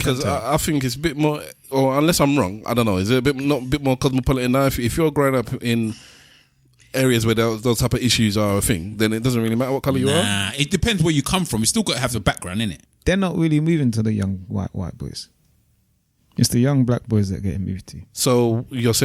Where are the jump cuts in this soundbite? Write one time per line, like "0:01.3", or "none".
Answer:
0:12.8